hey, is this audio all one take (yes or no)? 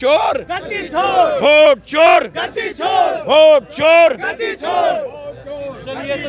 yes